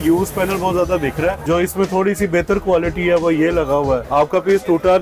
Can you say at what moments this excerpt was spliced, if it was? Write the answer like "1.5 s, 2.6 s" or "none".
1.4 s, 4.1 s